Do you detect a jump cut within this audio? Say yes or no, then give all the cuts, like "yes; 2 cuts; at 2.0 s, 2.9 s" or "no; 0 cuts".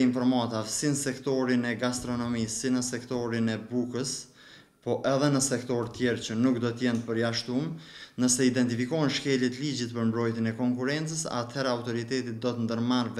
no; 0 cuts